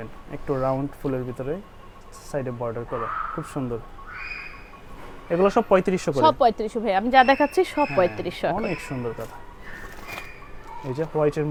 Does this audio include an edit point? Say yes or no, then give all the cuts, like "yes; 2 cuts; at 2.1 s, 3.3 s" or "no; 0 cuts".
no; 0 cuts